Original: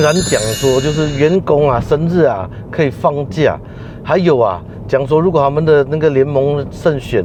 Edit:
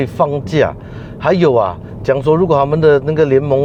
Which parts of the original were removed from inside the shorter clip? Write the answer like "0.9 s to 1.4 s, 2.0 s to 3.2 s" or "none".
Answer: none